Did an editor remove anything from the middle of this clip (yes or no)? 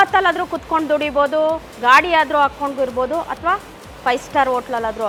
no